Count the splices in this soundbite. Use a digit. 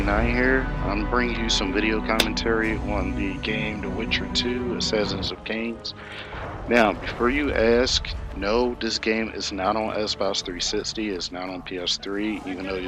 0